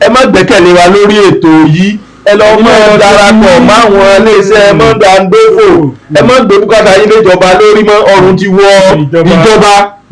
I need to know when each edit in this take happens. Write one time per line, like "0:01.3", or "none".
none